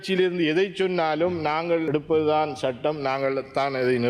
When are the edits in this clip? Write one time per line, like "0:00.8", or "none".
0:01.9